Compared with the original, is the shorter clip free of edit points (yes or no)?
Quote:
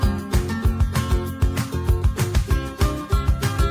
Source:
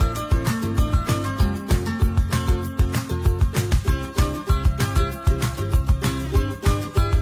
yes